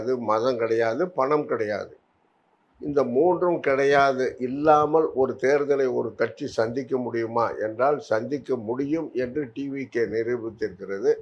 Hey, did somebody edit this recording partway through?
no; 0 cuts

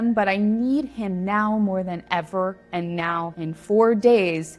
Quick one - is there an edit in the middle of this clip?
yes; 1 cut; at 3.3 s

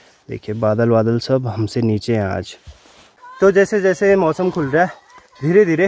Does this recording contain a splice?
yes; 1 cut; at 3.1 s

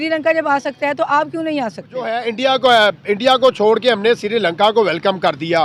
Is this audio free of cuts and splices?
no; 1 cut; at 2.1 s

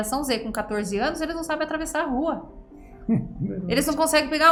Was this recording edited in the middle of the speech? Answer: no; 0 cuts

